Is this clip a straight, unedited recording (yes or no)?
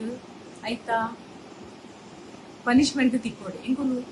yes